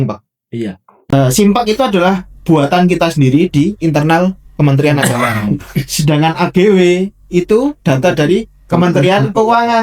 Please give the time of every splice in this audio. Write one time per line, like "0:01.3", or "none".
0:01.0